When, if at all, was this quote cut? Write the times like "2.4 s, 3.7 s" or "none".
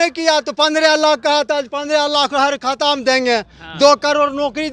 none